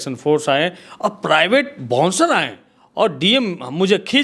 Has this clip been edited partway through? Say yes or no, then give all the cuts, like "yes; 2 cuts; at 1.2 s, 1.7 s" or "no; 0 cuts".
yes; 1 cut; at 2.8 s